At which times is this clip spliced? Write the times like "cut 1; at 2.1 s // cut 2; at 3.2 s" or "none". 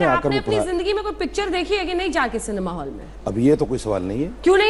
none